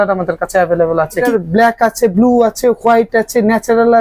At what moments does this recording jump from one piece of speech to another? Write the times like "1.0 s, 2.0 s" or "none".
1.2 s